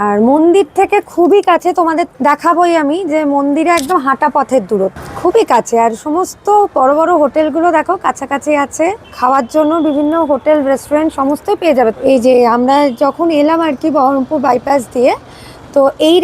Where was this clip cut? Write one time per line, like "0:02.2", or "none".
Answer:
0:02.1
0:05.1
0:09.1
0:12.0